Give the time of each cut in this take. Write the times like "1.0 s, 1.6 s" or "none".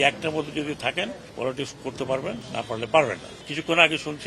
1.2 s, 2.4 s, 3.3 s